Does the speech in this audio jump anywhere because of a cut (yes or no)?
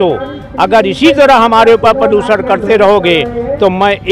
no